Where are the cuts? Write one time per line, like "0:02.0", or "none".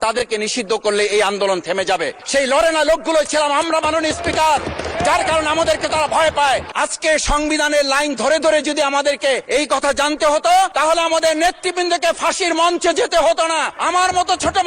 0:02.2
0:06.7
0:09.4
0:10.7
0:13.7